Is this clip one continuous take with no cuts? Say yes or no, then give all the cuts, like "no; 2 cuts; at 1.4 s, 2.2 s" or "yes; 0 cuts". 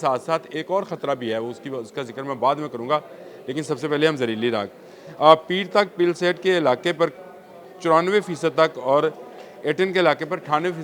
yes; 0 cuts